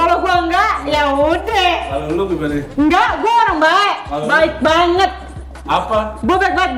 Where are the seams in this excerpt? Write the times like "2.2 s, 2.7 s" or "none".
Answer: none